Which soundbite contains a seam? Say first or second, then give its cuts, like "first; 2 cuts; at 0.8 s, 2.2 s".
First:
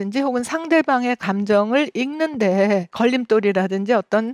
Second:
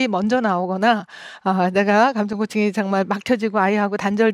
first; 1 cut; at 2.9 s